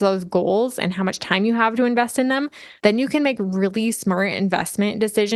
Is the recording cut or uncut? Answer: uncut